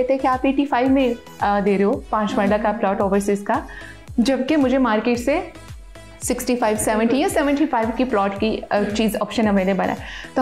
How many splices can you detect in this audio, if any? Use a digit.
0